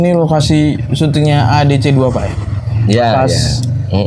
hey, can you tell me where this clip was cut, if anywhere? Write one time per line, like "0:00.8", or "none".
none